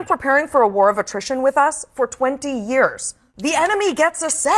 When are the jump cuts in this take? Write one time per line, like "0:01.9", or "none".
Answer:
0:03.3